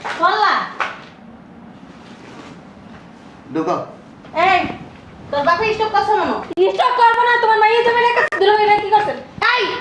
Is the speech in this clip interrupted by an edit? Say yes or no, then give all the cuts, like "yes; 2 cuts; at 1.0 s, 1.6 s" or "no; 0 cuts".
no; 0 cuts